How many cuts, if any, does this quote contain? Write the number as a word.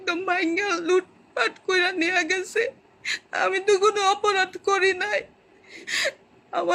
zero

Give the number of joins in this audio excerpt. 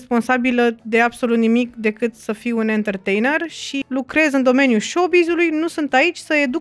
one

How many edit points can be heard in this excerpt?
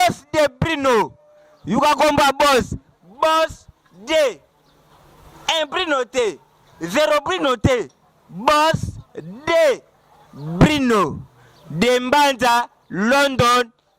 zero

